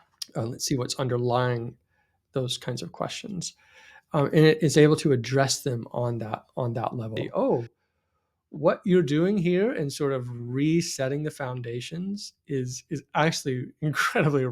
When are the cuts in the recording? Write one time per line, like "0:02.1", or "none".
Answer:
0:07.2